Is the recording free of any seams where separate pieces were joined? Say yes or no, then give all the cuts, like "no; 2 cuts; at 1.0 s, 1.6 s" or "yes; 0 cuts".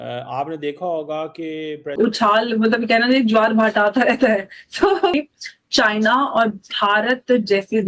no; 2 cuts; at 1.9 s, 5.1 s